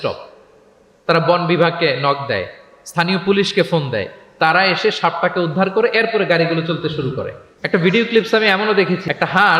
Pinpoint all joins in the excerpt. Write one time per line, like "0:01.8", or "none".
none